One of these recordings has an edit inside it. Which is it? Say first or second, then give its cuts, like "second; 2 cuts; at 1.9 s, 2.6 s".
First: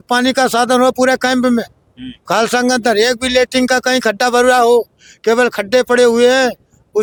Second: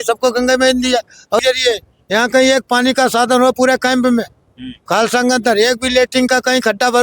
second; 1 cut; at 1.4 s